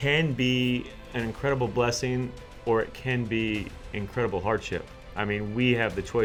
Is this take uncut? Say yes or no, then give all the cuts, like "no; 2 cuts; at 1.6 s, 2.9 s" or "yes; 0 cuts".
yes; 0 cuts